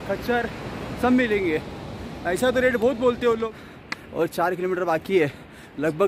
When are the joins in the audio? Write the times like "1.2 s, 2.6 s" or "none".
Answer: 3.4 s